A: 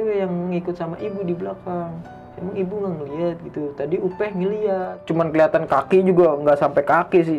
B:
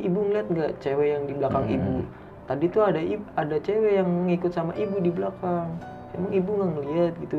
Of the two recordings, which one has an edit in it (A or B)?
A